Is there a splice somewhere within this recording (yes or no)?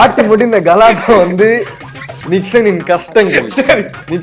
no